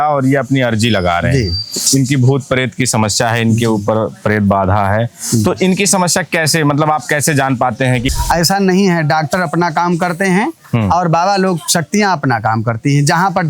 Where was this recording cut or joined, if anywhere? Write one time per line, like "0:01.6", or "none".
0:08.1